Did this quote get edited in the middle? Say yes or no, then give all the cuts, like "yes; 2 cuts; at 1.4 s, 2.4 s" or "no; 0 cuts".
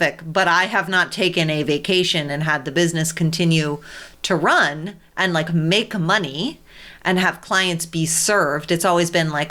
no; 0 cuts